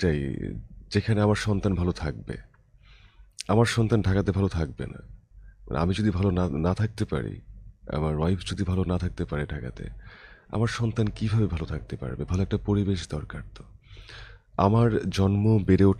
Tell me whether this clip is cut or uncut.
uncut